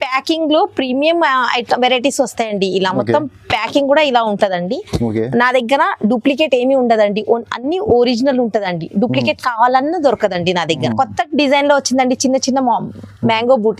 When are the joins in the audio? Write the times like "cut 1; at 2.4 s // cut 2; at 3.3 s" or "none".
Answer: cut 1; at 10.9 s